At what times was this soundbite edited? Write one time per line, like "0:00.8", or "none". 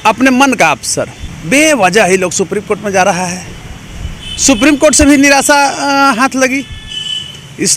0:01.2